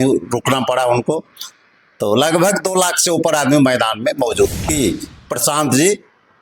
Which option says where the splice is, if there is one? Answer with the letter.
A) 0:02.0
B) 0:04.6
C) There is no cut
B